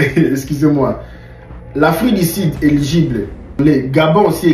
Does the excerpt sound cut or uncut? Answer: cut